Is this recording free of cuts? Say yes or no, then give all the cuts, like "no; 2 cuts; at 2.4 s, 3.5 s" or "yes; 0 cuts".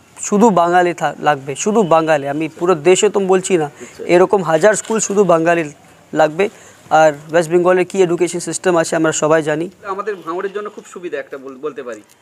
no; 1 cut; at 9.9 s